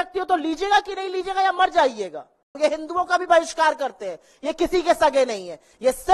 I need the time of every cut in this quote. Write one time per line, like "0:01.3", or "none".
0:02.6